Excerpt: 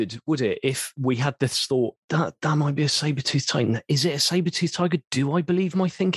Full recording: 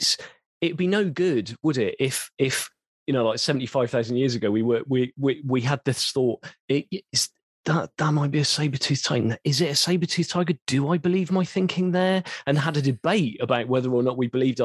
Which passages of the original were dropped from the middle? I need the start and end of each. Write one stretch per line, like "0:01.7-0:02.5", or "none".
0:02.3-0:05.4
0:06.4-0:07.6